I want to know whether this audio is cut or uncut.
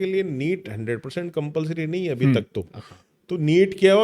uncut